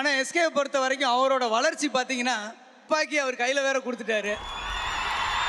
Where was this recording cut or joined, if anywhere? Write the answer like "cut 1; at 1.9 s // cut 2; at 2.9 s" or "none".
cut 1; at 2.7 s

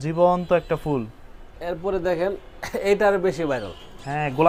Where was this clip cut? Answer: none

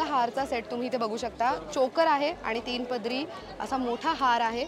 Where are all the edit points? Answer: none

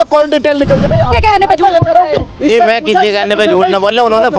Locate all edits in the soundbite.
cut 1; at 0.9 s

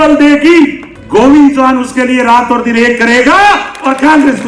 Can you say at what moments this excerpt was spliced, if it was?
none

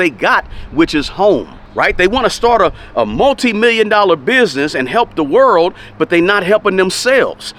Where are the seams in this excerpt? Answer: none

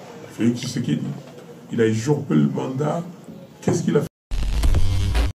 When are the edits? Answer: cut 1; at 4.2 s

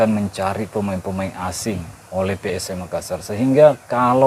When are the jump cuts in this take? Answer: none

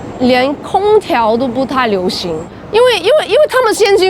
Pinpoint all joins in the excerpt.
cut 1; at 2.5 s

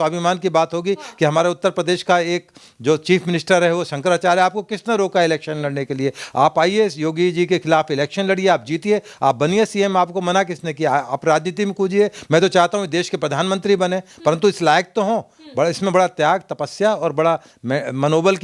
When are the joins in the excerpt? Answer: none

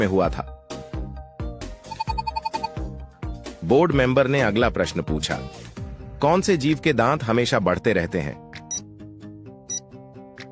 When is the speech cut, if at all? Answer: cut 1; at 1.6 s

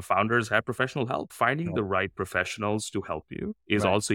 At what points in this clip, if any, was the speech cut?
cut 1; at 1.3 s

